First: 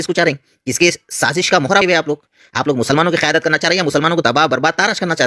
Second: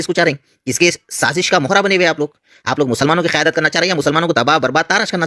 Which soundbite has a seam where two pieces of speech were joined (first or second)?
first